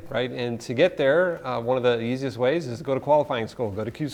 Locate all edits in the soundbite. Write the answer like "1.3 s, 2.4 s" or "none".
none